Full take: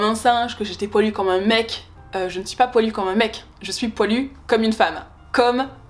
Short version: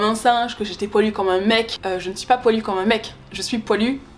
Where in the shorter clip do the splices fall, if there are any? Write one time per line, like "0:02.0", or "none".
0:01.8

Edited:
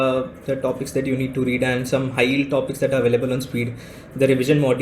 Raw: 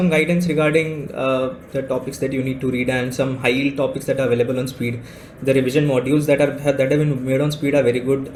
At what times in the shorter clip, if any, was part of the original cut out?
none

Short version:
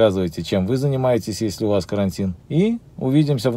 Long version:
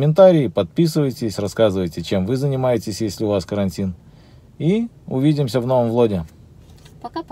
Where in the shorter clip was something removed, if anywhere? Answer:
0:02.4

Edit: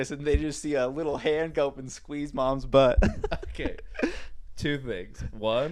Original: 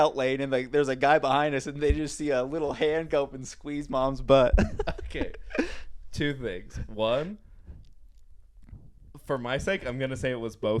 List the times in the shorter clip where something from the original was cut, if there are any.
none

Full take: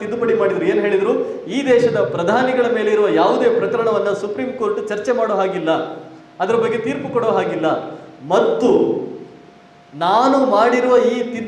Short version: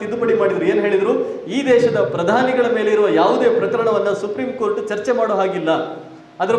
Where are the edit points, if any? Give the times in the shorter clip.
none

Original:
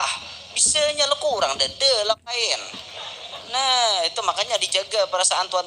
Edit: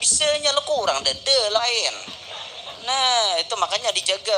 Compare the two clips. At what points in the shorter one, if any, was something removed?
0:01.6

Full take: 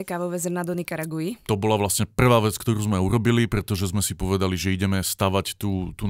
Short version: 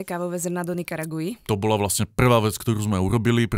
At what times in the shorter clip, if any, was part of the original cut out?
none

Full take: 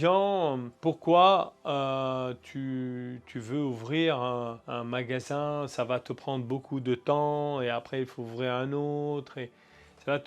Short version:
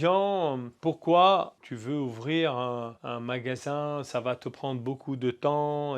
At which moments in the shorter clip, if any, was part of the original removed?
0:01.6

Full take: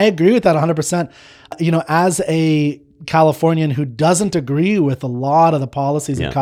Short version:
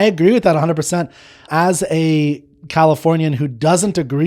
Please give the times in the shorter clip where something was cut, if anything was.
0:01.5

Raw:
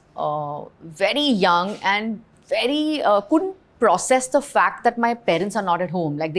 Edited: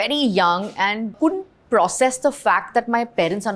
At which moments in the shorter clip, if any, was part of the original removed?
0:01.2

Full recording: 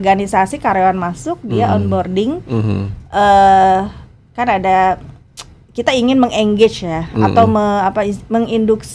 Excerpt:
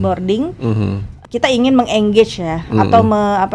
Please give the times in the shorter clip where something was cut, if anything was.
0:01.1

